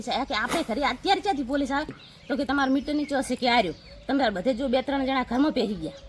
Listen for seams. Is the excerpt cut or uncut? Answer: cut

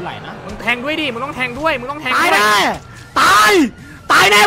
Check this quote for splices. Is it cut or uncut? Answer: uncut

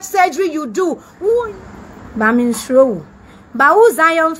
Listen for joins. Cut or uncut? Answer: cut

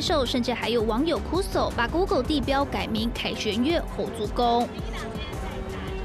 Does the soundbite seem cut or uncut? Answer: uncut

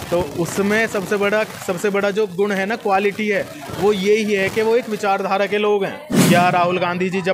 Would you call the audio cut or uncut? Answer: cut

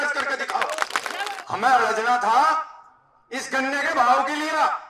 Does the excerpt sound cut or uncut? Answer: cut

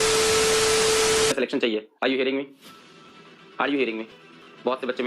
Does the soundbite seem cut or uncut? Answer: cut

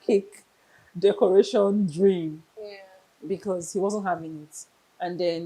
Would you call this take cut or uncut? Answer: uncut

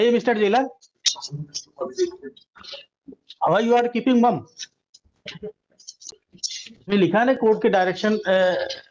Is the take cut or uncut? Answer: uncut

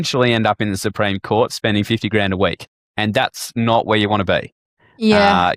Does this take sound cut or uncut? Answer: uncut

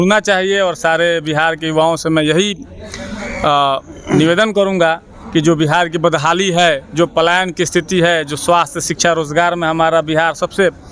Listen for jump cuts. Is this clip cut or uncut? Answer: uncut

